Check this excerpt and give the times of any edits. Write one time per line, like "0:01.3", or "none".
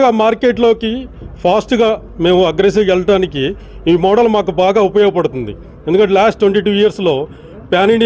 none